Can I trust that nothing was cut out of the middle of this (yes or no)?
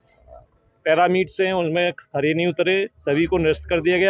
yes